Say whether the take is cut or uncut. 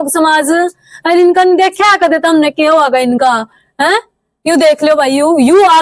uncut